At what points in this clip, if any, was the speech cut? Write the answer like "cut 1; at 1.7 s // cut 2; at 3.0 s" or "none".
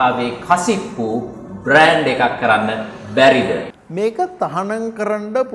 cut 1; at 3.7 s